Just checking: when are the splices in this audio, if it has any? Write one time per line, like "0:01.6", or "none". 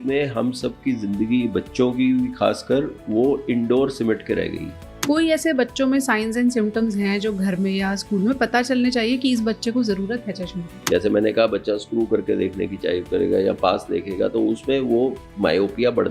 0:05.1
0:10.8